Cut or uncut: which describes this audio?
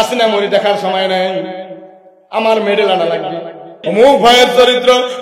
cut